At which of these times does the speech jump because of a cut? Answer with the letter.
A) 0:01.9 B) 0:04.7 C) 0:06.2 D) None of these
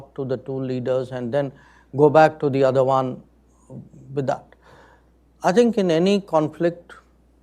D